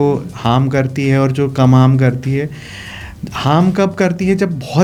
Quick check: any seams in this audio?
no; 0 cuts

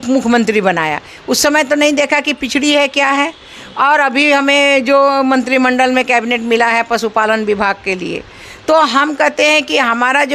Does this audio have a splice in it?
no; 0 cuts

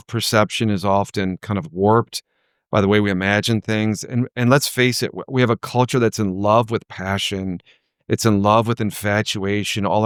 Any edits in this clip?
no; 0 cuts

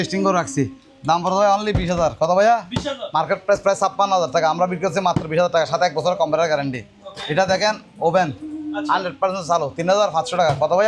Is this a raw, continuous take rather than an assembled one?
yes; 0 cuts

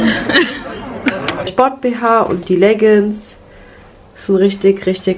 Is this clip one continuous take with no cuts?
no; 1 cut; at 1.5 s

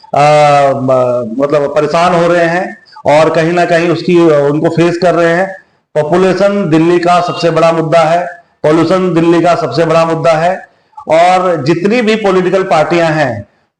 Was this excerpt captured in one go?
yes; 0 cuts

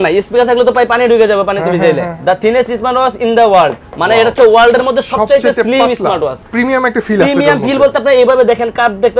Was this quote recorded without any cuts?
no; 2 cuts; at 2.1 s, 6.4 s

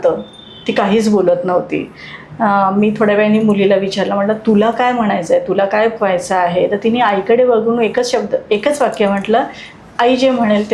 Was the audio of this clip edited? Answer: no; 0 cuts

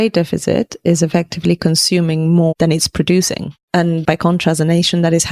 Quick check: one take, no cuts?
yes; 0 cuts

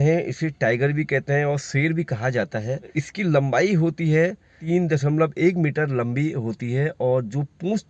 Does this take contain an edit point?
yes; 2 cuts; at 3.0 s, 4.6 s

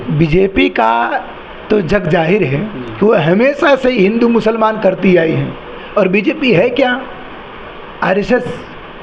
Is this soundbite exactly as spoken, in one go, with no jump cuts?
yes; 0 cuts

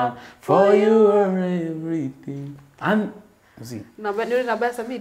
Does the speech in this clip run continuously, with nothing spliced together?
yes; 0 cuts

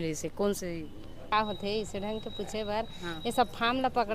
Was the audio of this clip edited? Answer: yes; 1 cut; at 1.3 s

